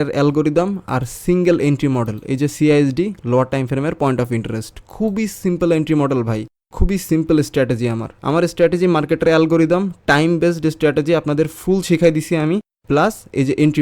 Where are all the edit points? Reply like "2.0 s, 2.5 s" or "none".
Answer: none